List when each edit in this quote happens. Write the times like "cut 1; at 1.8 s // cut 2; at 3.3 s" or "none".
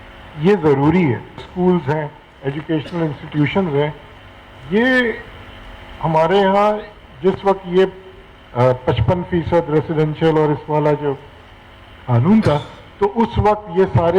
cut 1; at 1.4 s